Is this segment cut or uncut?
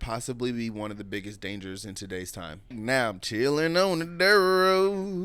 cut